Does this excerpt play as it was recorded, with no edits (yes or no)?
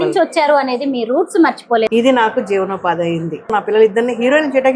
no